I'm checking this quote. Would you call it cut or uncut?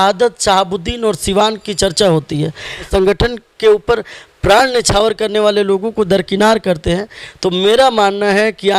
cut